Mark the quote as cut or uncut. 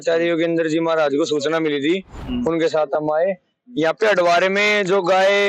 uncut